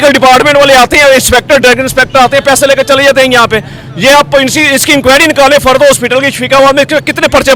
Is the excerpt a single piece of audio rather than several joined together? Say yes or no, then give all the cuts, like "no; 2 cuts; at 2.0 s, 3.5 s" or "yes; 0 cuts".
yes; 0 cuts